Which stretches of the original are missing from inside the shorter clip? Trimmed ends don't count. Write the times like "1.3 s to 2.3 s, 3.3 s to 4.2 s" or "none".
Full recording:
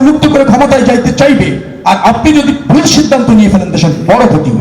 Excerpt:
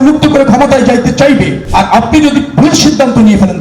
1.6 s to 1.7 s